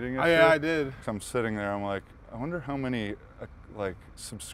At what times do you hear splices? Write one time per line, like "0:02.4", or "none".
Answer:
0:01.0